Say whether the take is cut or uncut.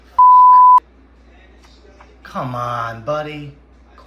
cut